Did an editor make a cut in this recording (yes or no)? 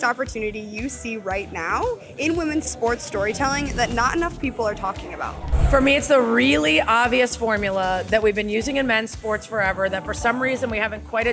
yes